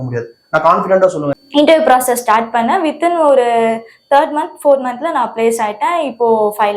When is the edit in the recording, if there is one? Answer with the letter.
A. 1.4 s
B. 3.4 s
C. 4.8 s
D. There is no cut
A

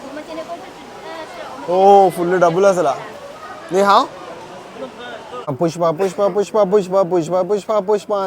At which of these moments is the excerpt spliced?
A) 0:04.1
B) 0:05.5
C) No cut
B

